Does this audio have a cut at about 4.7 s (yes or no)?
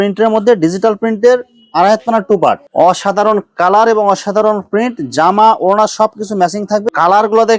no